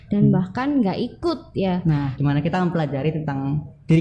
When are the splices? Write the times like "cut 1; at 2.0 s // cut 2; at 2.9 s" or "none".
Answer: cut 1; at 2.1 s